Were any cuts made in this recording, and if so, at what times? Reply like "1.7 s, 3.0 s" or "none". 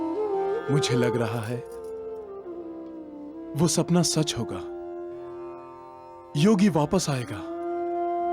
none